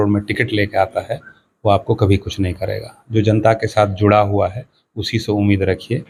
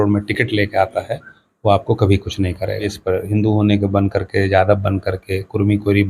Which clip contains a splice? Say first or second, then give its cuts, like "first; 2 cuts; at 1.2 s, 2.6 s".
second; 1 cut; at 3.0 s